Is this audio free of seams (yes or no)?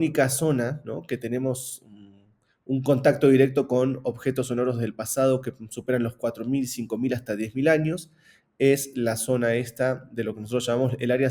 yes